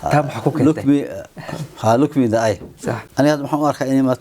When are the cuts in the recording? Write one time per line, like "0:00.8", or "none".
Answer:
0:03.0

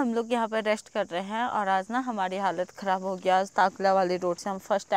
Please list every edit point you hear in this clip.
none

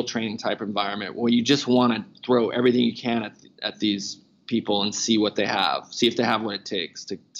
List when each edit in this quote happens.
none

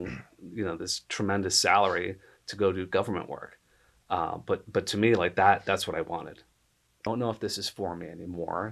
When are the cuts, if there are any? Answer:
0:07.1

